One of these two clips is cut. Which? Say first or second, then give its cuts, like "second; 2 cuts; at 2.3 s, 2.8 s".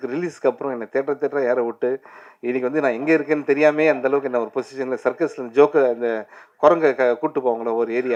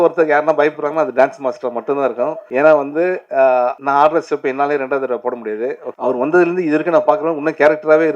second; 3 cuts; at 2.4 s, 3.8 s, 5.9 s